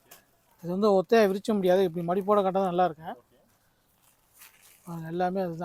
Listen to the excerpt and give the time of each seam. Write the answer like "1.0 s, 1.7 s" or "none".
none